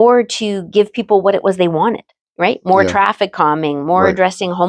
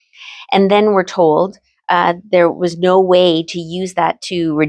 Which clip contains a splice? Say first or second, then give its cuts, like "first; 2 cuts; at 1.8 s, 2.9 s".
first; 1 cut; at 2.2 s